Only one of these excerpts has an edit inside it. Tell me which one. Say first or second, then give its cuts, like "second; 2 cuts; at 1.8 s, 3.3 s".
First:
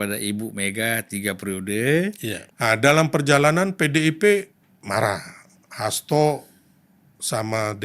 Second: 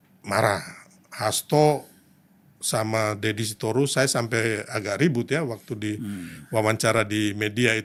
first; 1 cut; at 2.4 s